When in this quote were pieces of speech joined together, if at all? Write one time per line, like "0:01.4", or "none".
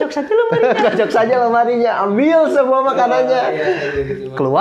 none